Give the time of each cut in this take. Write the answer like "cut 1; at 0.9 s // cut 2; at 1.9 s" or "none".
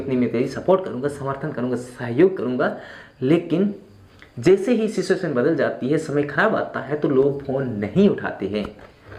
none